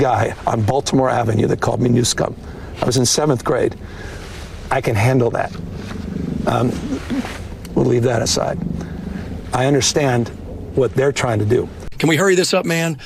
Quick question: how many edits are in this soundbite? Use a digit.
1